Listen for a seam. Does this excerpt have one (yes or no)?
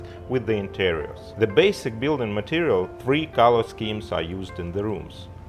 yes